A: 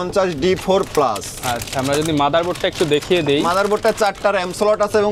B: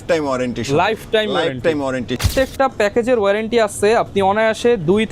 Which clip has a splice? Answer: B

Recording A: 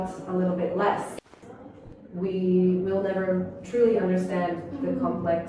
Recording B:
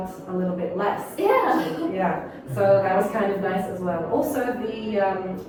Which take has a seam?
A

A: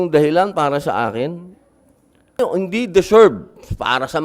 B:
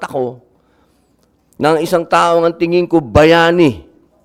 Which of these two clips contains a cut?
A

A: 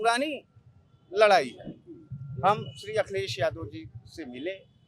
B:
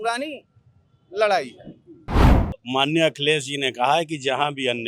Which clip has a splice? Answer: B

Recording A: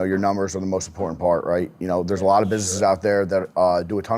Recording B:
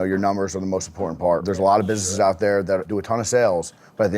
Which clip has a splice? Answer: B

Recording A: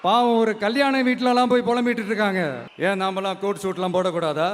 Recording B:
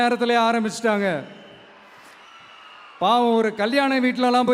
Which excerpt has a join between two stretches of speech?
A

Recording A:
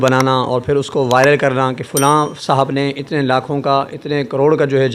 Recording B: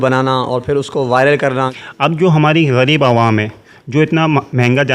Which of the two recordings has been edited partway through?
B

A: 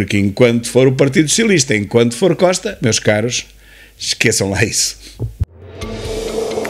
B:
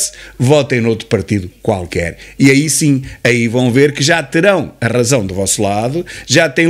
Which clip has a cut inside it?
A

